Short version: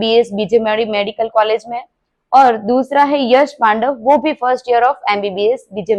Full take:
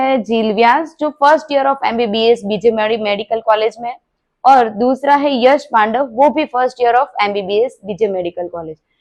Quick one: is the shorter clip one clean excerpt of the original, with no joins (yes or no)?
yes